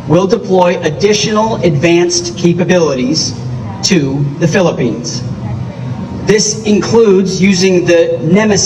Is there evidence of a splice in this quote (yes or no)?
no